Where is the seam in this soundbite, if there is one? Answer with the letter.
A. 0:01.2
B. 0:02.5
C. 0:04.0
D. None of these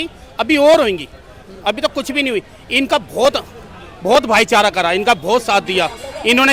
D